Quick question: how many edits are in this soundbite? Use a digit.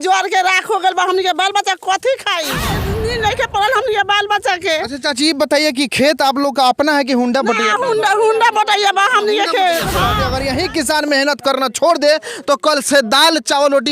2